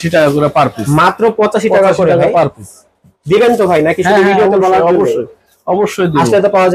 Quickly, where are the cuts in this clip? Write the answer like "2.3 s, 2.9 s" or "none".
none